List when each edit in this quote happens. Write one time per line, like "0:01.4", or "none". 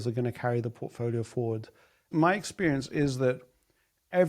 0:02.1